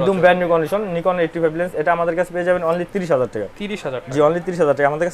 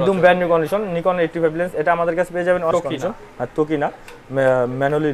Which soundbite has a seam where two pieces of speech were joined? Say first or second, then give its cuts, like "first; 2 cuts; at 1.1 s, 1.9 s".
second; 1 cut; at 2.7 s